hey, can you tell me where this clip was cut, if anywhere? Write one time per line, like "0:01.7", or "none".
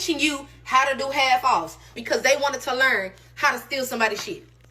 0:02.0